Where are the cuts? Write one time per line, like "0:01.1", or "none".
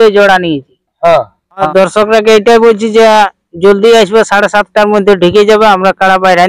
0:01.4